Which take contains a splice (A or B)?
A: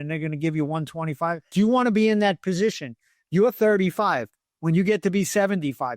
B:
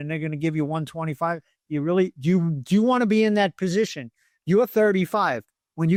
A